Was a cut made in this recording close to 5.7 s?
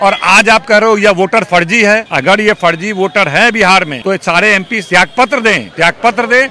yes; 4 cuts; at 2.1 s, 3.9 s, 4.8 s, 5.7 s

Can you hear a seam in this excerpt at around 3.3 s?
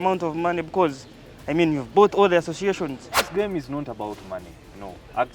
yes; 1 cut; at 3.3 s

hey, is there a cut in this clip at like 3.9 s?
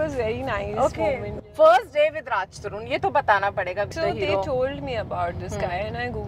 yes; 2 cuts; at 1.3 s, 3.9 s

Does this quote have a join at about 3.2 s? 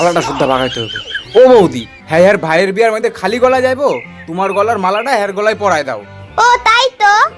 no; 0 cuts

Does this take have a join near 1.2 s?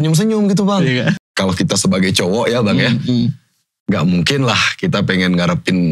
yes; 1 cut; at 1.2 s

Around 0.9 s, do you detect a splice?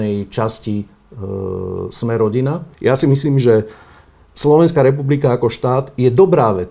no; 1 cut; at 2.7 s

